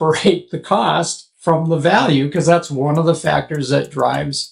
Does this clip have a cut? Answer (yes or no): no